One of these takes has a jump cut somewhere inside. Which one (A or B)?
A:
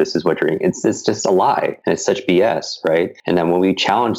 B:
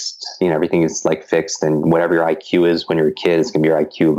A